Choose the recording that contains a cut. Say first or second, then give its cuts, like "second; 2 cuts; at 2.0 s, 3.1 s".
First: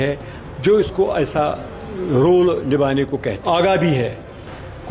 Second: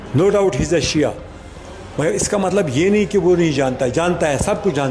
first; 1 cut; at 3.4 s